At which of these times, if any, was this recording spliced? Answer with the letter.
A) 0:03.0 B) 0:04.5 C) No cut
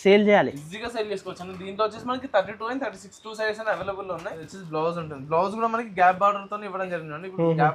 B